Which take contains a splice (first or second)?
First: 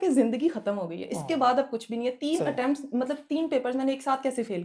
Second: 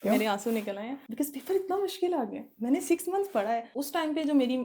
second